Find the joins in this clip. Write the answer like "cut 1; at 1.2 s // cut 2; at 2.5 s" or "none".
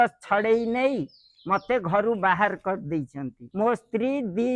cut 1; at 3.4 s